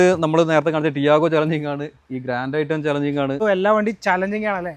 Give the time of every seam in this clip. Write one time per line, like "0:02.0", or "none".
0:03.4